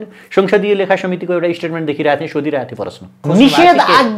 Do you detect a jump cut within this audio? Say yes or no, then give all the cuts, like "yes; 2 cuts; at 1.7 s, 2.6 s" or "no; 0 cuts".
yes; 1 cut; at 3.1 s